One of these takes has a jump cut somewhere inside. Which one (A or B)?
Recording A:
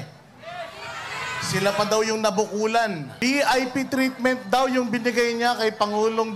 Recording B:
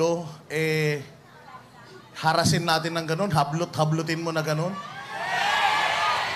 A